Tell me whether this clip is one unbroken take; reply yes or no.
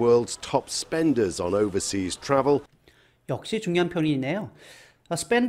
yes